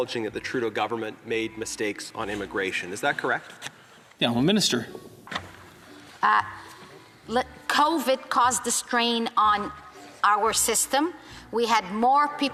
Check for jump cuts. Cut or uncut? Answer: uncut